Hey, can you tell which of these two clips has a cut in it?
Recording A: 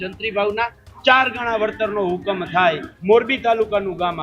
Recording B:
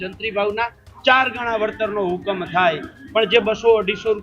A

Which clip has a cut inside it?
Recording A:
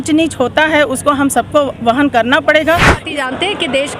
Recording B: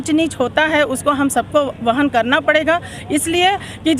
A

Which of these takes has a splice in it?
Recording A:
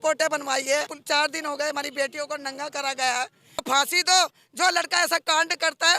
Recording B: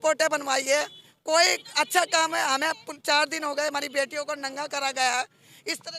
A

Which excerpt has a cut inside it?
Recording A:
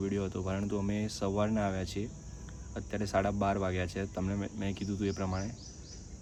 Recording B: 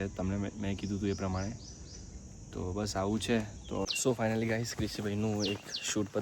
B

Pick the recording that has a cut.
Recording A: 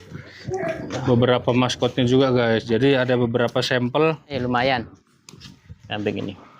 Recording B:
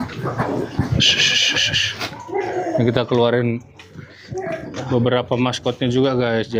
A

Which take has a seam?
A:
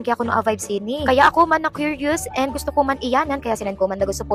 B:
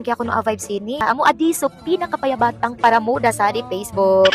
B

